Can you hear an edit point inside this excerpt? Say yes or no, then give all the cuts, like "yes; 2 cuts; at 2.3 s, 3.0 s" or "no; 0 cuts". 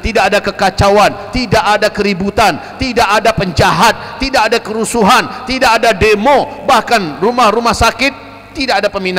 no; 0 cuts